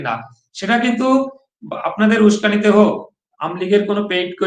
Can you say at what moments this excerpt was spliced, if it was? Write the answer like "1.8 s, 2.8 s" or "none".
none